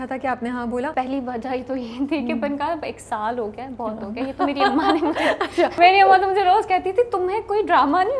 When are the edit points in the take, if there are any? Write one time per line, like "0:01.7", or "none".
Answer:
0:00.9
0:05.7